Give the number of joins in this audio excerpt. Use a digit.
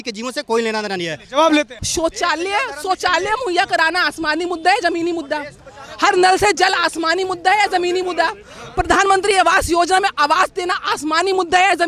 1